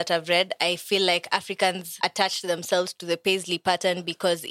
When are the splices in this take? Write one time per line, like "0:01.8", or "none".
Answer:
0:01.9